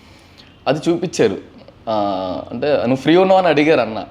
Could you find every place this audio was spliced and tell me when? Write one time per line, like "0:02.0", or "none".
none